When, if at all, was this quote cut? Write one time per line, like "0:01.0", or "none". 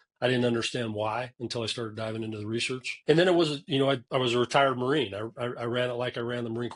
0:02.9
0:04.0